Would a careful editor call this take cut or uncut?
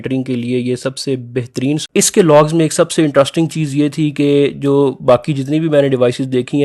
cut